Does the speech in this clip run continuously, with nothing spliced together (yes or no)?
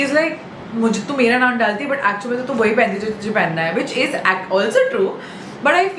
yes